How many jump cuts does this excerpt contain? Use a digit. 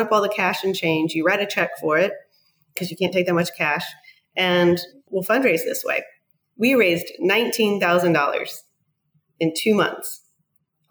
1